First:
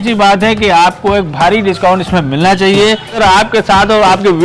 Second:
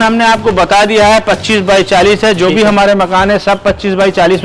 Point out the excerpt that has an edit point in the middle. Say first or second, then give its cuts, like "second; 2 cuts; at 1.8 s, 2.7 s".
first; 1 cut; at 3.2 s